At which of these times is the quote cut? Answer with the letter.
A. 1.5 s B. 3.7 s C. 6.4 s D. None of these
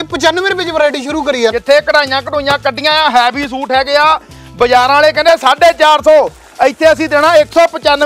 A